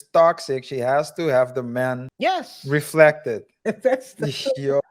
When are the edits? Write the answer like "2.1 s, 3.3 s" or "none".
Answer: 2.1 s, 3.5 s